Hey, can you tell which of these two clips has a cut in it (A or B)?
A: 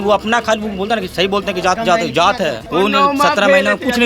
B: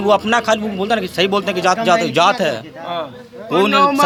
A